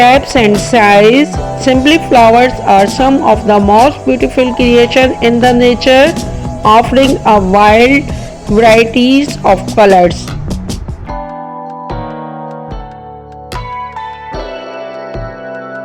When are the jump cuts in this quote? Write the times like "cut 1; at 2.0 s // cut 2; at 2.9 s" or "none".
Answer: cut 1; at 10.2 s